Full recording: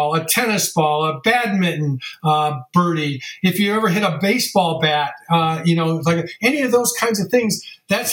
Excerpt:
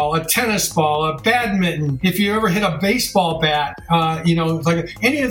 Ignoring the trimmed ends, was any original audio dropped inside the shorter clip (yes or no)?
yes